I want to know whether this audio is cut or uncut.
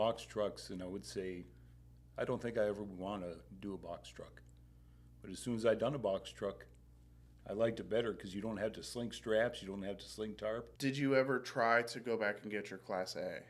cut